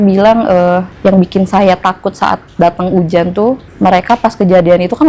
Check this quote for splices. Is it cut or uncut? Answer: cut